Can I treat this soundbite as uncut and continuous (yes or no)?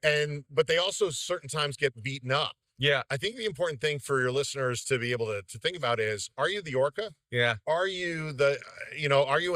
yes